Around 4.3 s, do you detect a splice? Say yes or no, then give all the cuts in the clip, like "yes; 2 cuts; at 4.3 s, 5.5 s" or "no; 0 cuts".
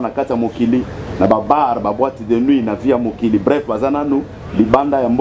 no; 0 cuts